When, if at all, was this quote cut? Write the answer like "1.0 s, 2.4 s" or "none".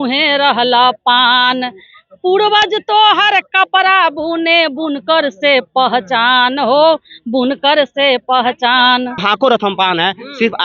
9.2 s